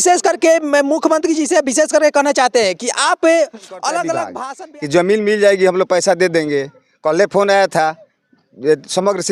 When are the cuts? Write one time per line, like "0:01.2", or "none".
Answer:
0:04.4